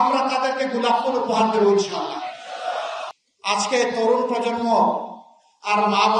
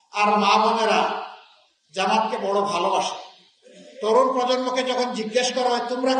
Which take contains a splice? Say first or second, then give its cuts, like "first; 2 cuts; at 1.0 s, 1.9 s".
first; 1 cut; at 3.1 s